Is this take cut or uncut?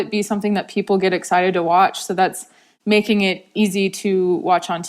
cut